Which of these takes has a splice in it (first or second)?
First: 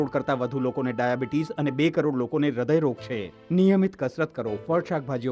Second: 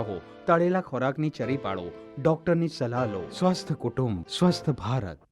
second